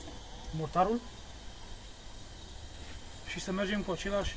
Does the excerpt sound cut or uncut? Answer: uncut